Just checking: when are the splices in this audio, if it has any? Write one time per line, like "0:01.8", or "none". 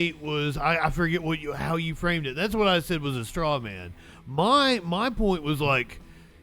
none